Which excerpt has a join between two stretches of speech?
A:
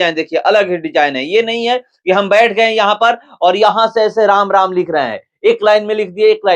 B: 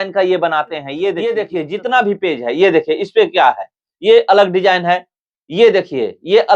B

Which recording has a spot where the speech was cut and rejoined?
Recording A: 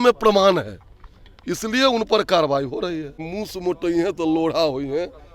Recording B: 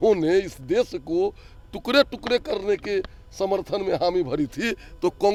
A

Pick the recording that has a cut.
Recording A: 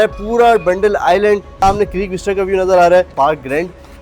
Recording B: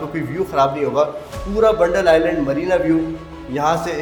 A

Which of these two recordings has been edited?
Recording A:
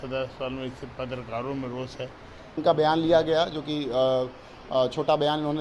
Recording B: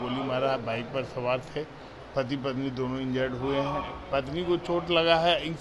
A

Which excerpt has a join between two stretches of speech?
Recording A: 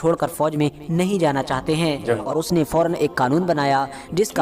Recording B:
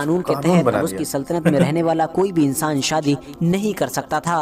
A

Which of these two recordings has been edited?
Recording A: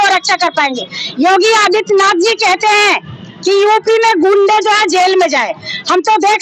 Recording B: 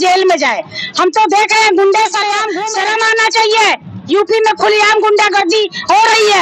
B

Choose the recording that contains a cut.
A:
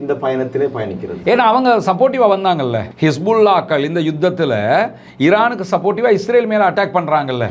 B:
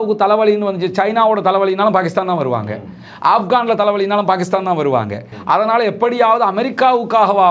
B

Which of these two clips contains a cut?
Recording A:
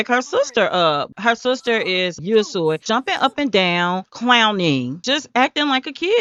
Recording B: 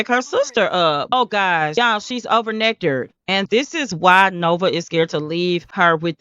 B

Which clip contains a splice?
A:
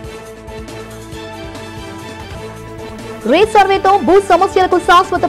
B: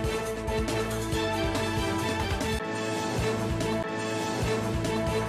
B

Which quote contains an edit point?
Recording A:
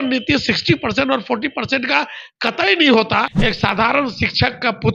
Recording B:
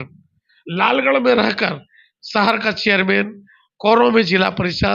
A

